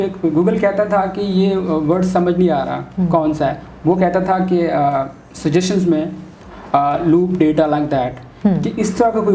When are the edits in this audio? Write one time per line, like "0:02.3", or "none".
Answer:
none